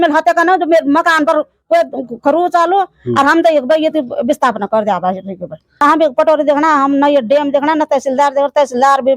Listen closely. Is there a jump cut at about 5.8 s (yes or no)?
yes